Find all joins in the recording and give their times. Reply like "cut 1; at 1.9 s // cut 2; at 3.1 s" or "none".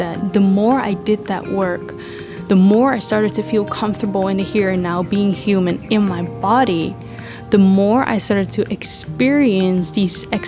none